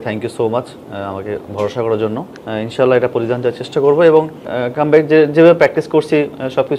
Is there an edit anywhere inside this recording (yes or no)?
yes